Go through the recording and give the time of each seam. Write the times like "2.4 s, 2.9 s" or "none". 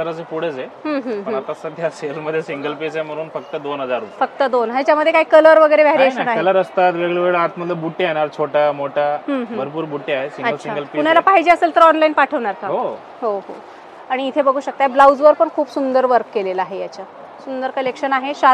none

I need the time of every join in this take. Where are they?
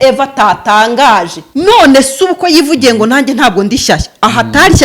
1.4 s

